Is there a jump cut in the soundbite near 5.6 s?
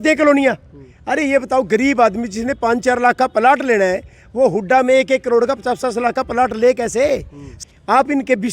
no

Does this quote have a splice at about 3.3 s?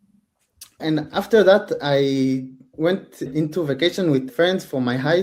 yes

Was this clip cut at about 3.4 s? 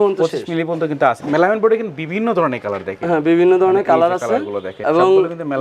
no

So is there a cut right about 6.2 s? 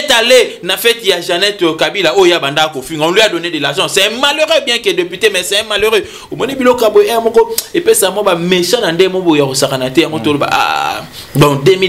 no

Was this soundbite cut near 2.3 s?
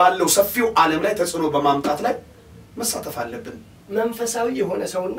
no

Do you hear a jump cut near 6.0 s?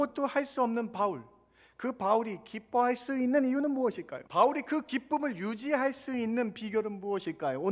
no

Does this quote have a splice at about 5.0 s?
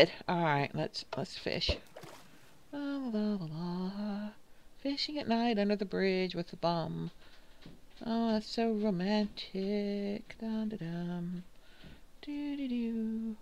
no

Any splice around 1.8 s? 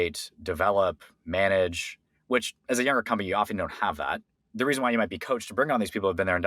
no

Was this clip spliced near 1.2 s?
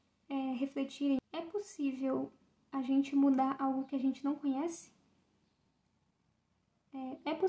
yes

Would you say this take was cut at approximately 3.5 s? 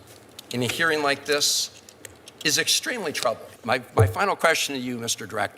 yes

